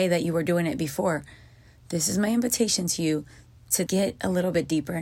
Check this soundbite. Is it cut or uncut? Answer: cut